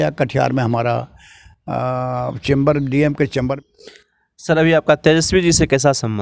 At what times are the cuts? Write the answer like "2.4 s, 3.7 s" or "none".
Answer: 3.6 s